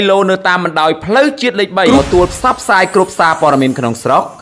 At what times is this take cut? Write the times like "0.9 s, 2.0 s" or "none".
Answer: 1.9 s